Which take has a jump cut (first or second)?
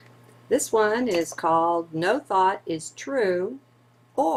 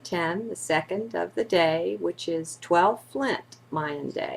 second